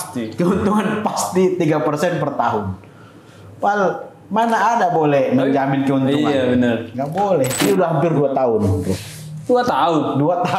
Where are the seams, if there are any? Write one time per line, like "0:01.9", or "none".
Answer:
0:07.6